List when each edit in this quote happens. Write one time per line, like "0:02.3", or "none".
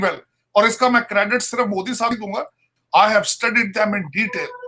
0:02.3